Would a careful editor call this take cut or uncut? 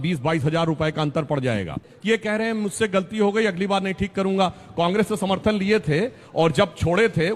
cut